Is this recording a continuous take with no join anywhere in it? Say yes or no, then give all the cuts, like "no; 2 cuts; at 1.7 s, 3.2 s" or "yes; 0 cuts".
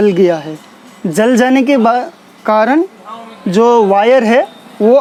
yes; 0 cuts